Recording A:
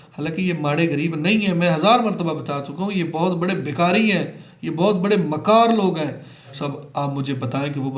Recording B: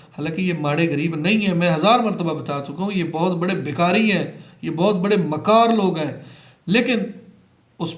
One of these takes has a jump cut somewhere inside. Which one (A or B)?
A